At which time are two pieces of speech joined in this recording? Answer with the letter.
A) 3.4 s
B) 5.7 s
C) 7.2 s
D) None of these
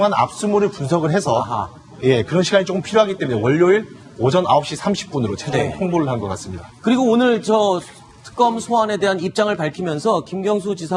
B